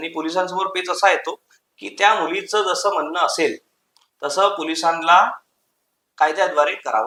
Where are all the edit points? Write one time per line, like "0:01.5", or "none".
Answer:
none